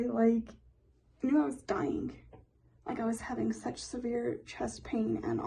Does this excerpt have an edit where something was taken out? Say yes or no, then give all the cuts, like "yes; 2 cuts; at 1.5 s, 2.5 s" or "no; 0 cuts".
no; 0 cuts